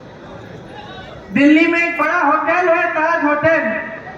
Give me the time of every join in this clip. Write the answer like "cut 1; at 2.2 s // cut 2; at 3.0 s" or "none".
none